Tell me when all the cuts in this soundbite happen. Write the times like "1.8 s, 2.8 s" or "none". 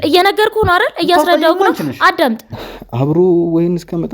2.5 s